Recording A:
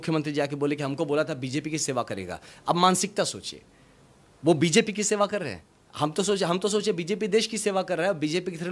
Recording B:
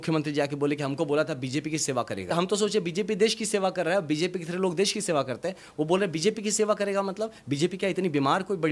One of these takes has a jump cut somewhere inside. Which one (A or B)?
B